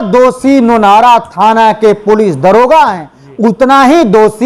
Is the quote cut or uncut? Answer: uncut